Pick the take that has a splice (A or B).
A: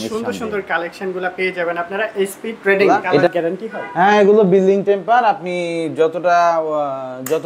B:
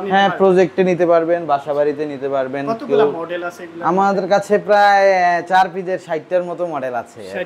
A